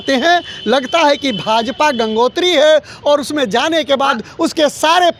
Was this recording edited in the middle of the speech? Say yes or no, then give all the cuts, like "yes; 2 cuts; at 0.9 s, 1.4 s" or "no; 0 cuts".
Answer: no; 0 cuts